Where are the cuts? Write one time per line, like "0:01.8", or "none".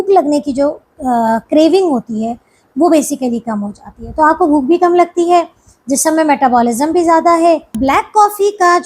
0:07.7